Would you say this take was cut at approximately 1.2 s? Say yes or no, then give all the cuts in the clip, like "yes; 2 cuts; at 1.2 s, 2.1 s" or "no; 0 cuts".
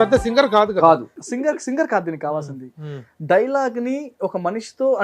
yes; 1 cut; at 1.2 s